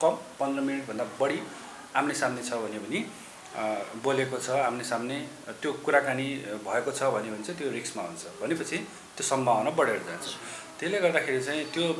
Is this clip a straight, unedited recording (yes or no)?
yes